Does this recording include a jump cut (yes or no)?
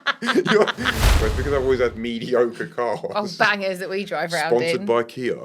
yes